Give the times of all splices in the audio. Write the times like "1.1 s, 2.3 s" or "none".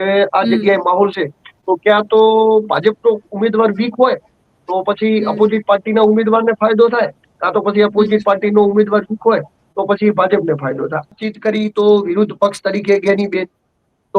11.1 s

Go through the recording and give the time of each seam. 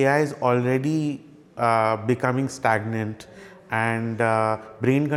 none

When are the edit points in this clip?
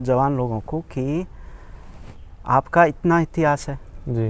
none

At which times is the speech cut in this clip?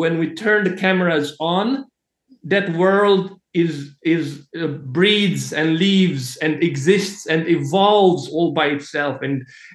none

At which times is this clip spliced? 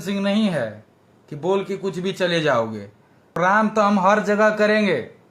3.3 s

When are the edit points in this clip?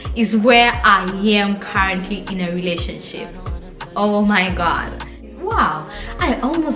5.4 s

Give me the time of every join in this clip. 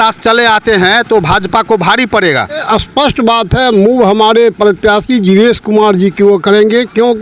2.6 s

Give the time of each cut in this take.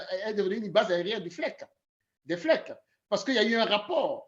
none

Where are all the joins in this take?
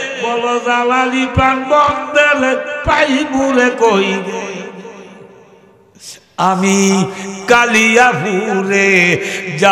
6.2 s

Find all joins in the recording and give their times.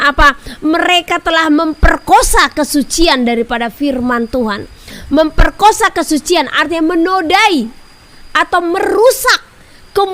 none

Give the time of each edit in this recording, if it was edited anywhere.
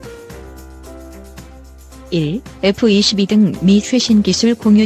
2.1 s

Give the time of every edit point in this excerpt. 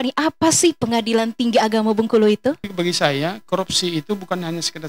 2.7 s

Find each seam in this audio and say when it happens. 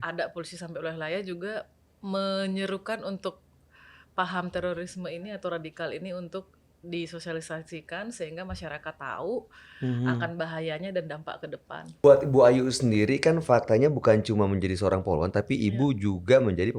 11.9 s

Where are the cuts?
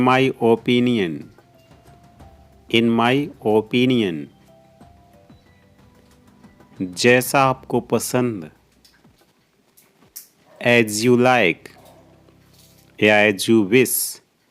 4.4 s, 6.6 s

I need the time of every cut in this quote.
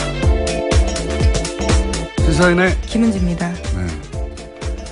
2.3 s

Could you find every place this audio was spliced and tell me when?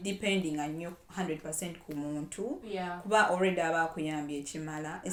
none

